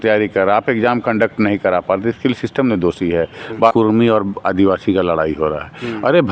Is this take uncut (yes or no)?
no